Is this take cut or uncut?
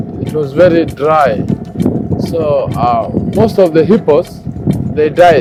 uncut